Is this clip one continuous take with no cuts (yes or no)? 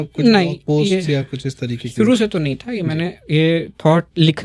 yes